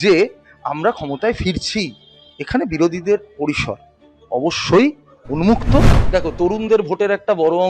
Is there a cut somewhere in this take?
yes; 1 cut; at 6.0 s

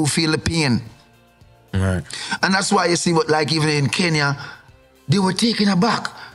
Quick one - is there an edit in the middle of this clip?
no; 0 cuts

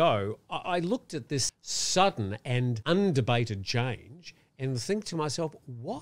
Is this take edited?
yes; 2 cuts; at 1.5 s, 2.8 s

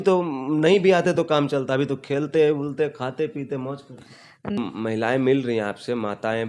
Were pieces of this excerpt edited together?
yes; 1 cut; at 4.6 s

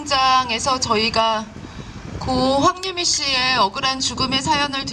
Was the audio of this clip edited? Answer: no; 0 cuts

